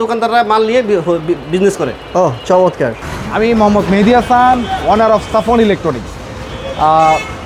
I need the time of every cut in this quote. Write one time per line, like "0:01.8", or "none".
none